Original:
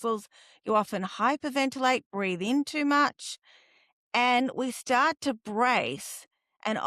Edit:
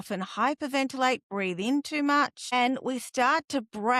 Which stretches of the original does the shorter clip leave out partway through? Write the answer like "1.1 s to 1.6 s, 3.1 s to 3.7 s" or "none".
3.3 s to 4.2 s